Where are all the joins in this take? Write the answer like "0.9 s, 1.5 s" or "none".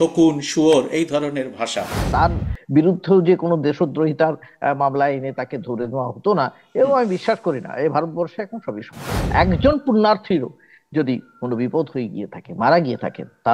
2.0 s, 9.2 s

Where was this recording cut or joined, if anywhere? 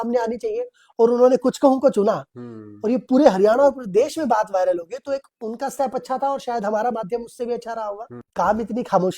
8.2 s

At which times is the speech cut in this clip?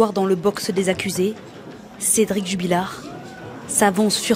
none

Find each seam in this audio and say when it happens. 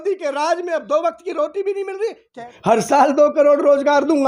2.5 s

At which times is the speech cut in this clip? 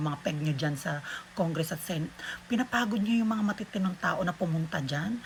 none

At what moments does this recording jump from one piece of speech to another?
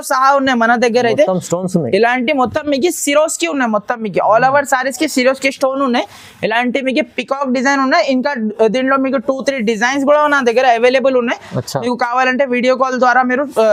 none

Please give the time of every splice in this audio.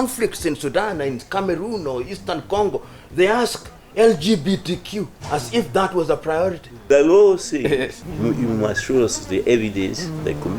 6.7 s, 8.0 s

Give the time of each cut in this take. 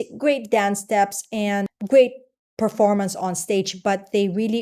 1.7 s

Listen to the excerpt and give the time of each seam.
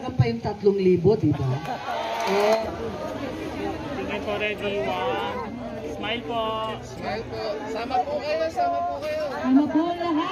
2.6 s

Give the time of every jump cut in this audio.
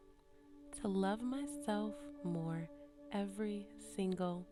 none

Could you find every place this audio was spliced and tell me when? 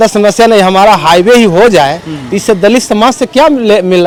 none

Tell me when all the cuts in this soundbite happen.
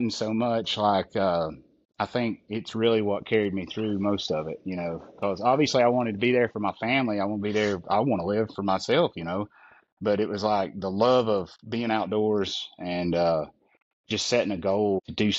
none

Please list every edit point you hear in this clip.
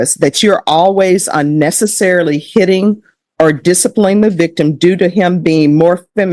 none

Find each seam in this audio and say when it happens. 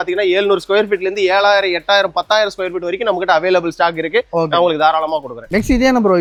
none

